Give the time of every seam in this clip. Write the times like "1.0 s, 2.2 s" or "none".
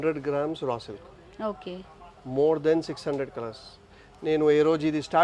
none